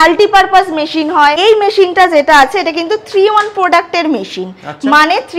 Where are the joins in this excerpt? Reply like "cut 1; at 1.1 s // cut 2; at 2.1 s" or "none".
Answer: cut 1; at 1.4 s